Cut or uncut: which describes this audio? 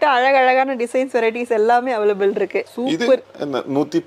uncut